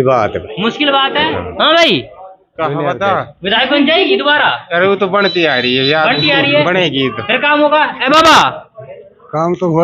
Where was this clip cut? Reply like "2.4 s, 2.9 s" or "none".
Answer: none